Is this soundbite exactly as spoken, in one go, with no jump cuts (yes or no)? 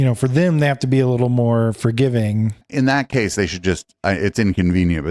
no